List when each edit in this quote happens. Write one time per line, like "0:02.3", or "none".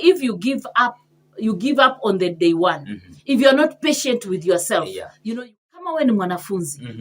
0:05.2